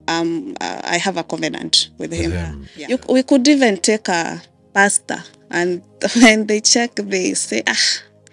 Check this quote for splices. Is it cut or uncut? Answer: cut